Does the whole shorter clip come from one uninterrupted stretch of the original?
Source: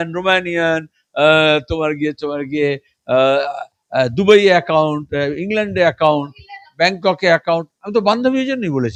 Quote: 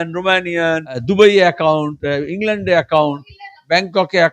no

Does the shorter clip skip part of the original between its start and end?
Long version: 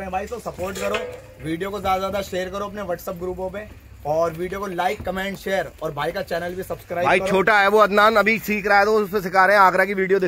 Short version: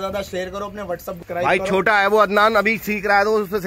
yes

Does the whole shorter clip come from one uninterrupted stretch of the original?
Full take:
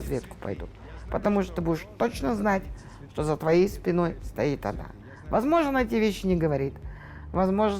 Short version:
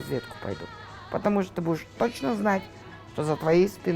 yes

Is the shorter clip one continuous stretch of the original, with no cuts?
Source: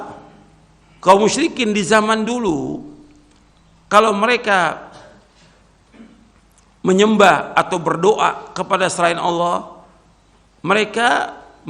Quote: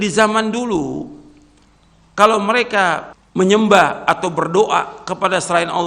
no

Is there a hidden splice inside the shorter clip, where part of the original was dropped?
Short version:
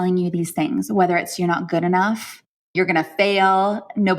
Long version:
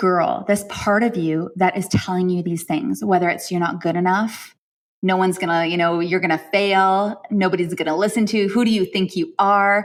yes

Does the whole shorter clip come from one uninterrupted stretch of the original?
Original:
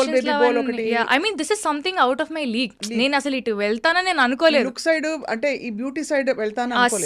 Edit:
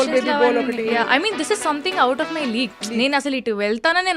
yes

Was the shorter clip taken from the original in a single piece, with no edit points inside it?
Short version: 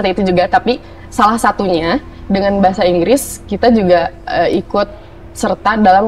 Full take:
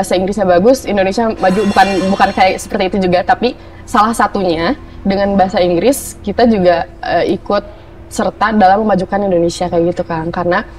yes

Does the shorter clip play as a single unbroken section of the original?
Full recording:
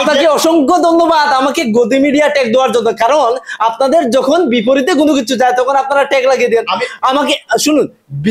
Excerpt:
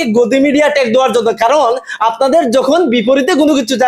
yes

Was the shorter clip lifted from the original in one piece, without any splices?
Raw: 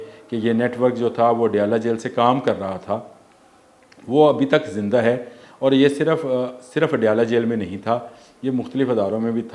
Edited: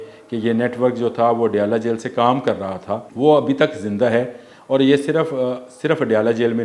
no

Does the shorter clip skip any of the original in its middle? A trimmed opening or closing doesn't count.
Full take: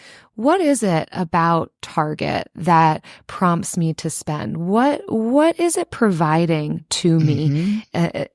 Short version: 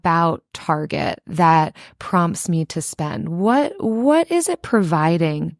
no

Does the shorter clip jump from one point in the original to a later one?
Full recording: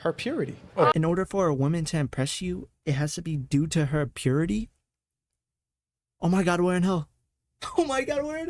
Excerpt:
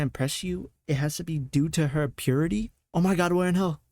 yes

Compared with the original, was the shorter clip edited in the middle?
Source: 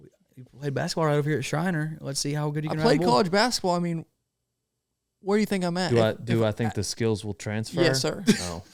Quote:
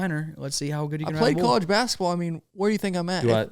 yes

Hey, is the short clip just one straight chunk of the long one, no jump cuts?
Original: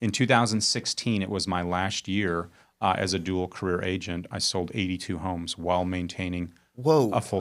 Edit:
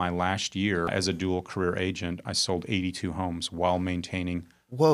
no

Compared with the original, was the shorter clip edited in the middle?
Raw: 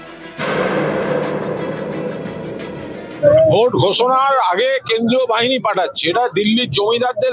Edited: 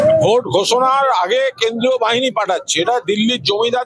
no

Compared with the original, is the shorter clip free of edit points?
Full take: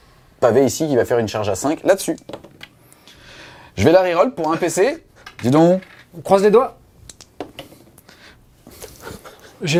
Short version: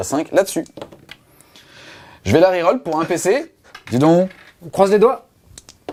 yes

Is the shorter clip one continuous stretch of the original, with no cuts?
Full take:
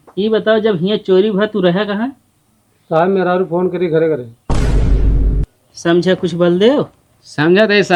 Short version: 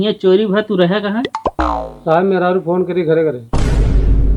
no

